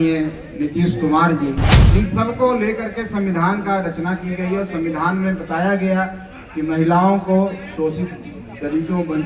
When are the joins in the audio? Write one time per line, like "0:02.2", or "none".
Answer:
0:01.7

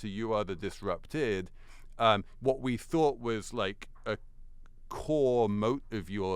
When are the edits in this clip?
none

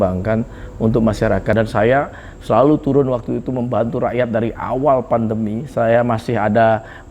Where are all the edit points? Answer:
0:01.5

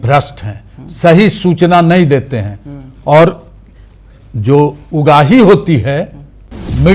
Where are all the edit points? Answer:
none

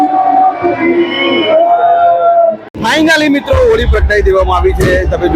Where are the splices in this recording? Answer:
0:02.8

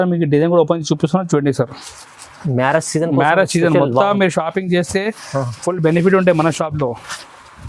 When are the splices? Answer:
none

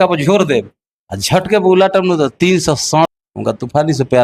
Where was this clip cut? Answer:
0:03.1

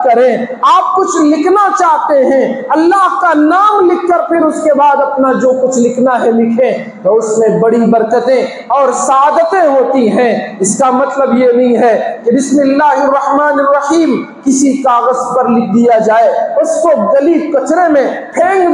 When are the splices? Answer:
none

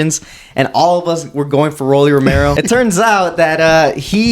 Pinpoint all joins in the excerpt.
0:02.6

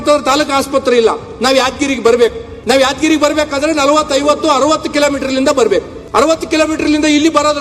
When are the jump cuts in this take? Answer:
0:02.5
0:06.0

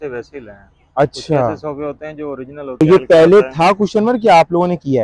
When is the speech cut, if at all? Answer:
0:02.8

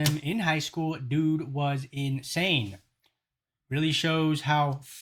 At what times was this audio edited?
none

